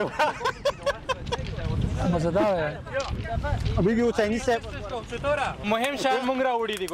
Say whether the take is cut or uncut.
cut